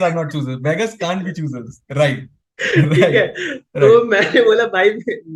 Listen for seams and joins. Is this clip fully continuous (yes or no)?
yes